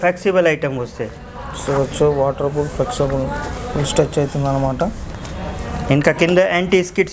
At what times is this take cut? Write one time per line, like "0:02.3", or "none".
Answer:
none

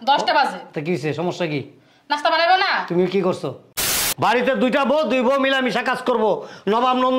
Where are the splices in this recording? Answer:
0:04.0

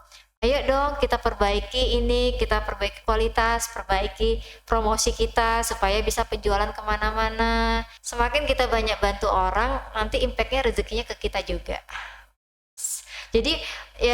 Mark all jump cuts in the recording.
0:08.0

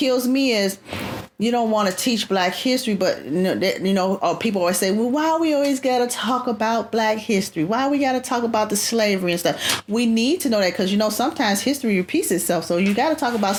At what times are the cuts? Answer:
none

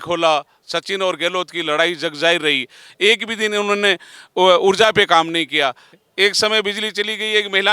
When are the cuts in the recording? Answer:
0:06.0

